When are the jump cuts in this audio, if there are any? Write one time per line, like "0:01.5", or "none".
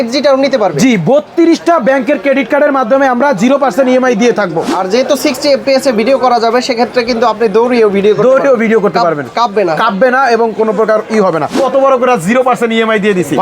0:04.7
0:11.5